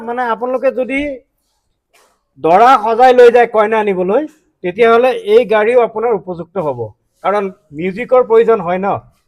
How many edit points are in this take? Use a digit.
0